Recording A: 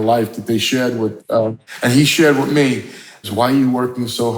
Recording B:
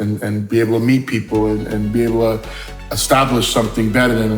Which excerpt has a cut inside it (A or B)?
A